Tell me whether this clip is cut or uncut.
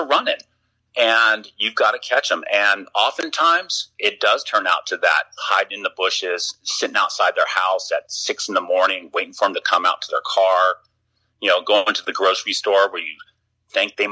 uncut